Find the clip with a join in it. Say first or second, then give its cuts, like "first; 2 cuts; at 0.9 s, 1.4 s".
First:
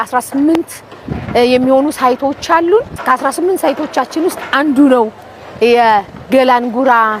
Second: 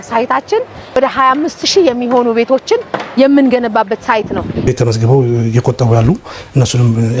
second; 2 cuts; at 1.0 s, 4.7 s